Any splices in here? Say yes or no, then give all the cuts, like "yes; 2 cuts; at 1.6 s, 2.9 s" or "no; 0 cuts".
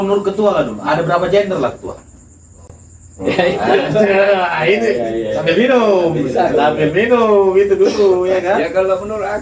no; 0 cuts